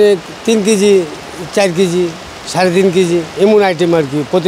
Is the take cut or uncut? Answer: uncut